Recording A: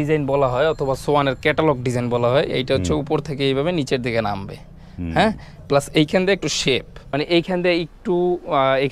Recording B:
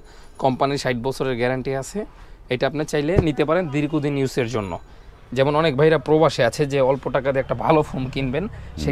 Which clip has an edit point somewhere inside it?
A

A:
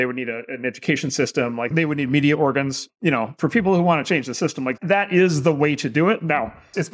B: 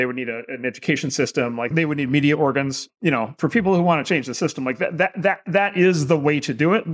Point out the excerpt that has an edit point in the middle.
A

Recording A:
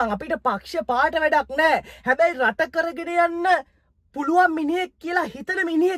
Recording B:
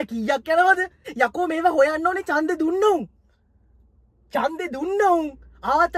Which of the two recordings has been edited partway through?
B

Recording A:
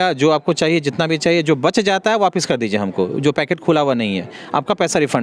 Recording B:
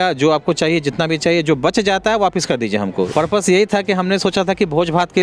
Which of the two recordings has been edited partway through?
B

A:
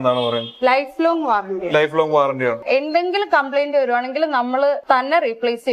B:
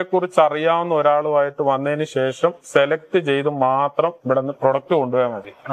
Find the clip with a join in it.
A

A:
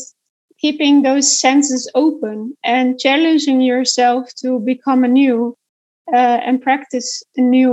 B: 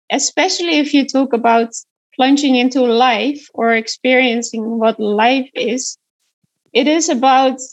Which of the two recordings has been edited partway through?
B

